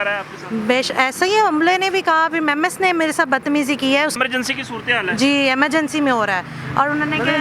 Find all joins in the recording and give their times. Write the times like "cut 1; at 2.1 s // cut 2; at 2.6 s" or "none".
cut 1; at 4.1 s

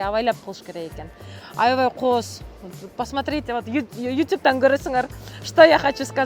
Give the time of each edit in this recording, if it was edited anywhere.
none

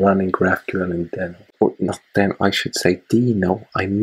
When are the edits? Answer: cut 1; at 1.4 s

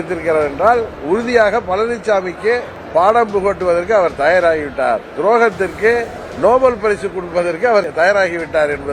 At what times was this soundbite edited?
cut 1; at 2.8 s // cut 2; at 6.2 s // cut 3; at 7.9 s

